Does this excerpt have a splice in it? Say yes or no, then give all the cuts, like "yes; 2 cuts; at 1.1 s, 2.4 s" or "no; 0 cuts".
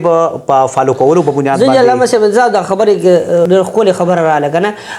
no; 0 cuts